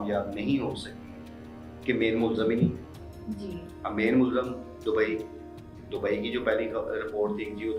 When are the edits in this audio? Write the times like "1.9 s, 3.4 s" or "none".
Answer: none